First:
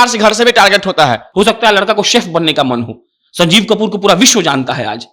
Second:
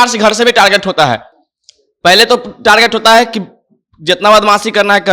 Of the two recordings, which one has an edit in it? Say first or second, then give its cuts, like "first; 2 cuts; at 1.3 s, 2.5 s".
first; 1 cut; at 1.2 s